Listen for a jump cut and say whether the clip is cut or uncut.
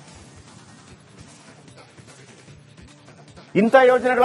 cut